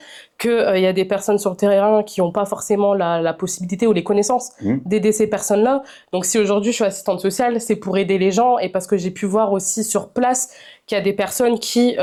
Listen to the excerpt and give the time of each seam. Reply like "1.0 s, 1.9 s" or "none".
none